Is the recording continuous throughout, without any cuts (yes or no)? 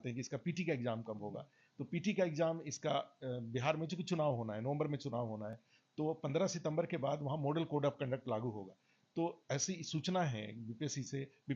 yes